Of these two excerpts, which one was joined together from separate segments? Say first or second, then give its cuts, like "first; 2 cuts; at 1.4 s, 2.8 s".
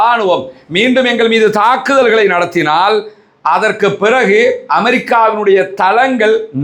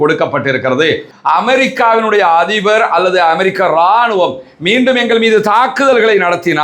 second; 1 cut; at 1.1 s